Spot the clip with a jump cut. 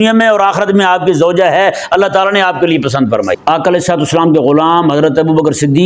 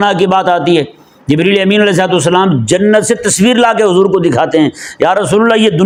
first; 1 cut; at 3.4 s

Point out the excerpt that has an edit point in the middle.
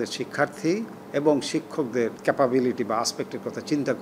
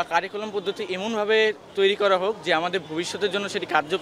first; 2 cuts; at 1.0 s, 2.2 s

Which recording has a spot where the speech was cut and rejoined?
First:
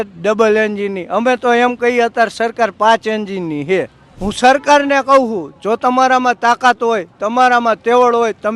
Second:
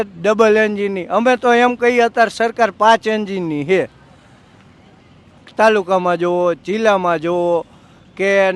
first; 1 cut; at 4.0 s

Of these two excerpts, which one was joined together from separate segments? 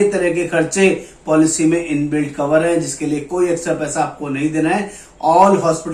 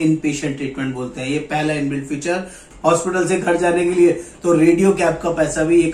second; 1 cut; at 2.6 s

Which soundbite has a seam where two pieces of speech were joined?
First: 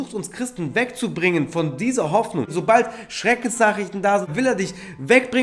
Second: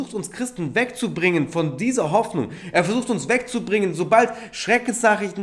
first; 2 cuts; at 2.5 s, 4.3 s

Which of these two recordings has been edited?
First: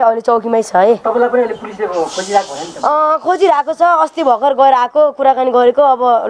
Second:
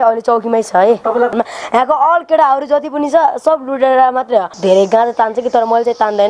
second; 2 cuts; at 1.3 s, 4.5 s

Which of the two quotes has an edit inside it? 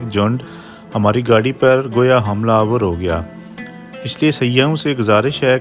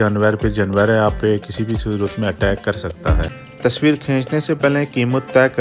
second; 1 cut; at 3.3 s

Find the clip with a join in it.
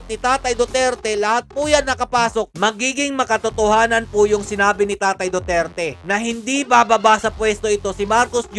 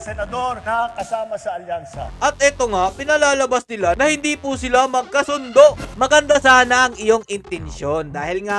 second; 2 cuts; at 2.0 s, 5.9 s

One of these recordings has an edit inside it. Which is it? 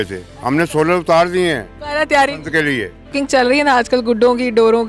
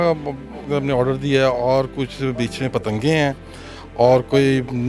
first; 2 cuts; at 1.8 s, 3.1 s

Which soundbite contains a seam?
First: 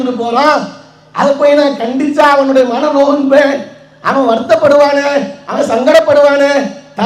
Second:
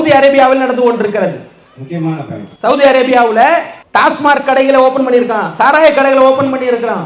second; 2 cuts; at 2.4 s, 3.8 s

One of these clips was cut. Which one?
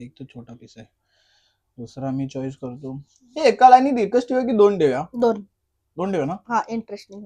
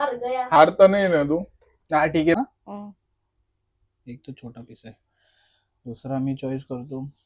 second; 1 cut; at 2.3 s

